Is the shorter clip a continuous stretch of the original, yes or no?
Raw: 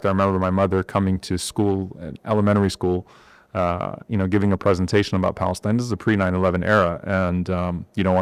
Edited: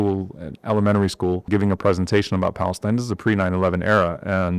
no